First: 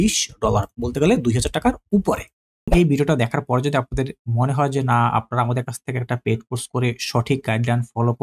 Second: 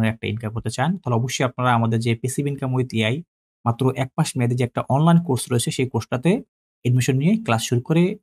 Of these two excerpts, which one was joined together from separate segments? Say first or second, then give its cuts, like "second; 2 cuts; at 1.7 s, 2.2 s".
first; 1 cut; at 2.7 s